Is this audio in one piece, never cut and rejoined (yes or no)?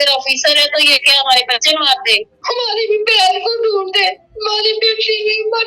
no